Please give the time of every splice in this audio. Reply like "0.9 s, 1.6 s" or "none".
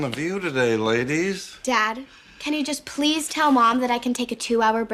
none

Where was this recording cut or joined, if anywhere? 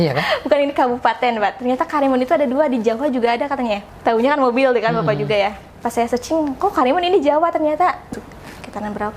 3.8 s, 8.1 s

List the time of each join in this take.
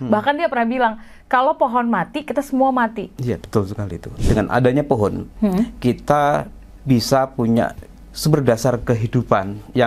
4.1 s

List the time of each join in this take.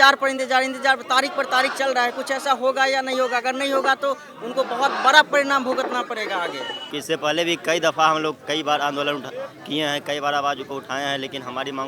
6.9 s

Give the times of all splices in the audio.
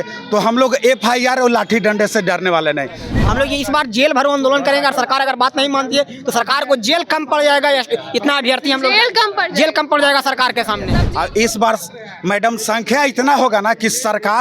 3.1 s, 10.9 s

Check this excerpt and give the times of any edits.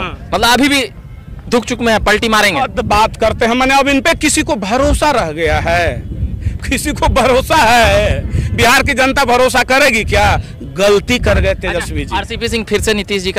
none

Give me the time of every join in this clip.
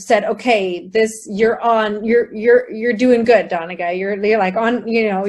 none

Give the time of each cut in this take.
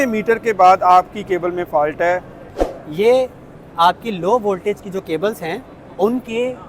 2.4 s

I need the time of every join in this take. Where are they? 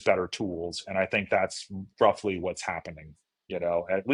none

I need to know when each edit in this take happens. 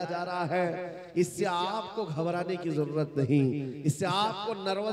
none

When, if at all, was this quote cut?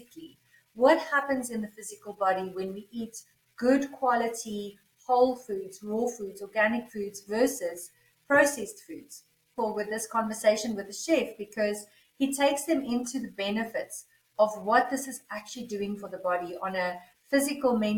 9.5 s

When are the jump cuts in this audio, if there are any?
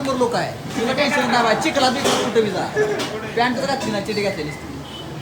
none

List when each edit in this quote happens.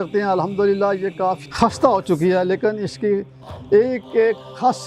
1.4 s

